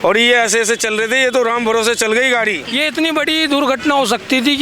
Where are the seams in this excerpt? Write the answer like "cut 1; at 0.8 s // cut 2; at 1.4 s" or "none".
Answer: cut 1; at 2.6 s